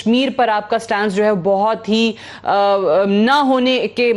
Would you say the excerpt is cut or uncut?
uncut